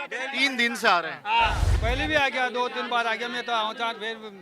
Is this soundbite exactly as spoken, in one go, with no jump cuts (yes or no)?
no